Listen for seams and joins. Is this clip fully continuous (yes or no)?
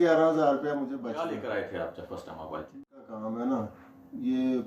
no